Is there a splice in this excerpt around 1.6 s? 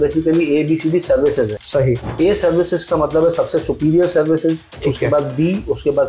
yes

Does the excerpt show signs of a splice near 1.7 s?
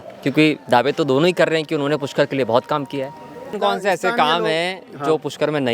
no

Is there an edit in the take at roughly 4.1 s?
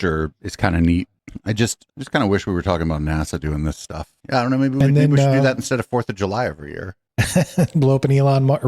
yes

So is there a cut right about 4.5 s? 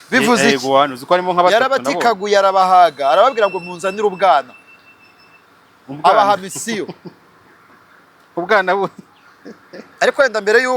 no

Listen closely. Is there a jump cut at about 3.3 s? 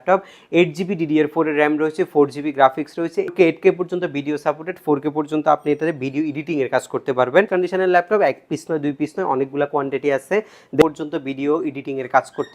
yes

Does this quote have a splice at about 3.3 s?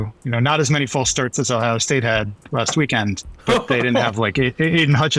yes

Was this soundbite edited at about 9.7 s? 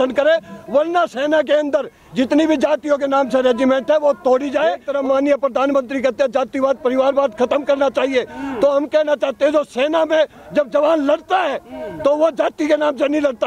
no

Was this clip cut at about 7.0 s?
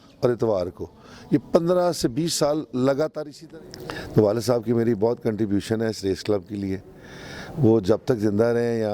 no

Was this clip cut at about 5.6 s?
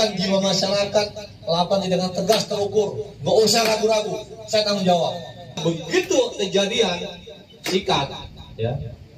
yes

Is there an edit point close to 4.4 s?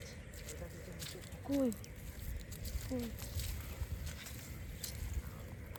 no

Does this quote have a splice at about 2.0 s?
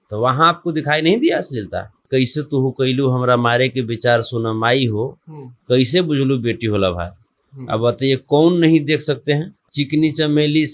yes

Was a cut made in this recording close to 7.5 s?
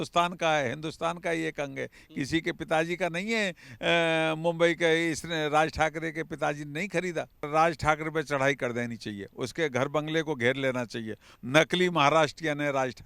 yes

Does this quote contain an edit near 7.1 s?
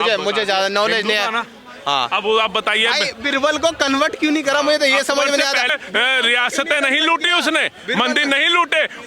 no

